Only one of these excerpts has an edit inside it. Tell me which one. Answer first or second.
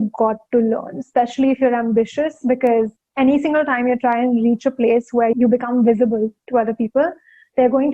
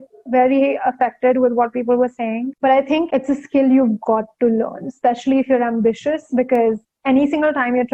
first